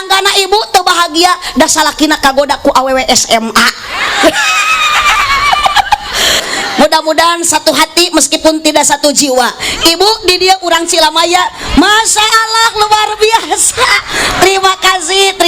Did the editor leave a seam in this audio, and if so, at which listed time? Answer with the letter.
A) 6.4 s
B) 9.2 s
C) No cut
A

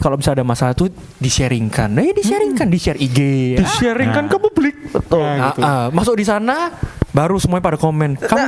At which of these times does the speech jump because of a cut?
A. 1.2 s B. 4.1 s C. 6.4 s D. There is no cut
D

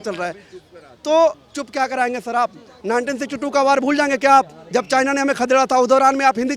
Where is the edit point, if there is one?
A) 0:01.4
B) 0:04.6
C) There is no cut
A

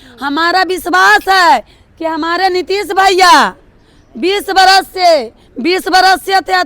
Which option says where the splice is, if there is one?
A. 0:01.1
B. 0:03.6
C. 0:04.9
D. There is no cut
D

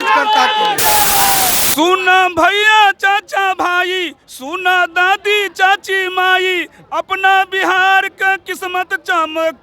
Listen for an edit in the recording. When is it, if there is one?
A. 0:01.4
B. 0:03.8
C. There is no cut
A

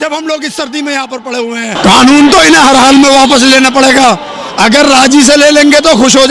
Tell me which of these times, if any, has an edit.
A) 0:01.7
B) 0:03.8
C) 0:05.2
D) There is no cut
A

